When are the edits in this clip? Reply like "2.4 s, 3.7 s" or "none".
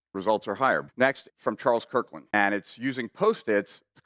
0.8 s, 2.2 s